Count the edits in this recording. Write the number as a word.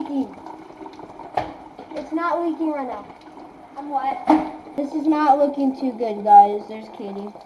one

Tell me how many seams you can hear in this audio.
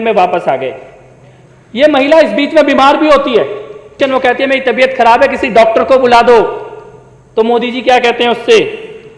one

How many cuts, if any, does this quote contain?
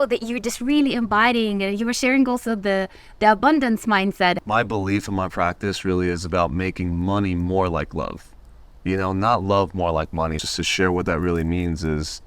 two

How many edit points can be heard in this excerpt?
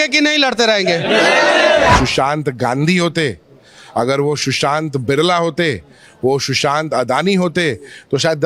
one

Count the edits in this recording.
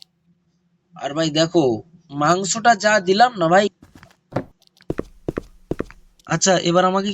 one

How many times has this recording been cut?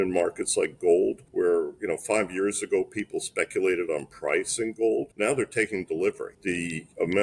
three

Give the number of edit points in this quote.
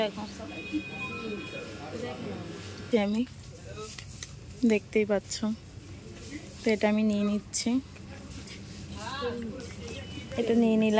one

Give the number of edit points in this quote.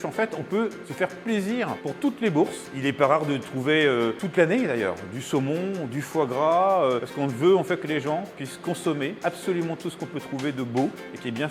six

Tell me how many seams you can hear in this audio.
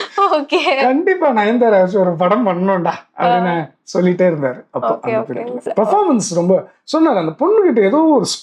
zero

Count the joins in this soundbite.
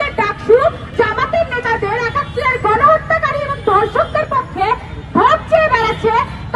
one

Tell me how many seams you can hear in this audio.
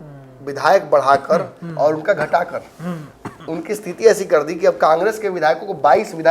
zero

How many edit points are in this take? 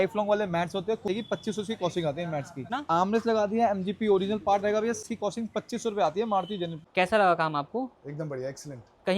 four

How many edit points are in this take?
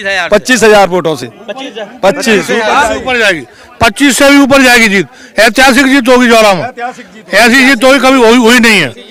zero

